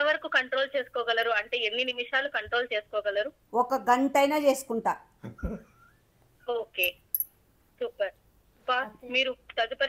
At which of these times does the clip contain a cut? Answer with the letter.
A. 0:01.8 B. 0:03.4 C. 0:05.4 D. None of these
D